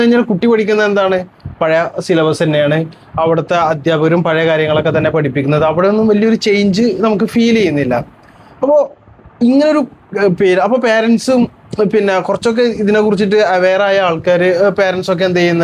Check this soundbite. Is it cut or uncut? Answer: uncut